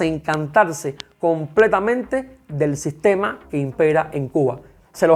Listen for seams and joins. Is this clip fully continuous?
yes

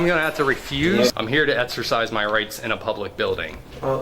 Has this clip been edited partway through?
yes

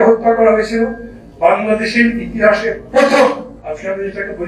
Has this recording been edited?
yes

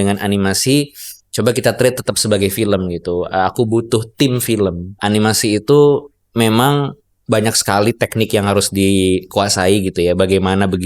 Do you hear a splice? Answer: yes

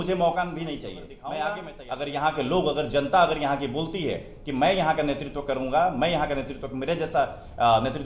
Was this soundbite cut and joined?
yes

